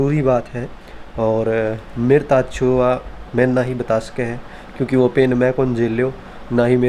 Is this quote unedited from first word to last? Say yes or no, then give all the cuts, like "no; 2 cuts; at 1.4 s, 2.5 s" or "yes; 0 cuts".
yes; 0 cuts